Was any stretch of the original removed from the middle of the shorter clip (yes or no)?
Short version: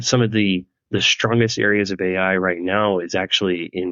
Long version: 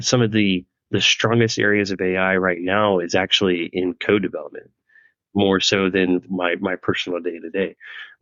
no